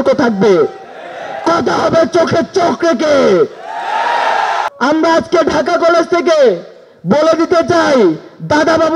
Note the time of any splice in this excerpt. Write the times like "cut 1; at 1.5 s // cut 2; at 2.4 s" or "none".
cut 1; at 4.7 s